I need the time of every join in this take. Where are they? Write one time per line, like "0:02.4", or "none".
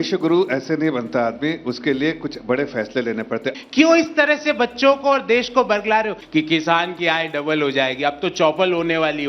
0:03.6
0:06.2